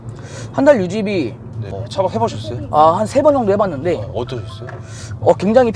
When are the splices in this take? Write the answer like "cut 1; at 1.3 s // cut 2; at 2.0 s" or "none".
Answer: cut 1; at 1.8 s